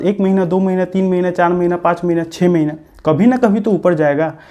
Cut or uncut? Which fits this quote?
uncut